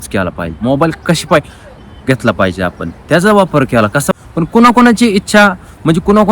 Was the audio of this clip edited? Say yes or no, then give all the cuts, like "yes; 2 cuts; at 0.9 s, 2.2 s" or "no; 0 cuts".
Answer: yes; 1 cut; at 4.1 s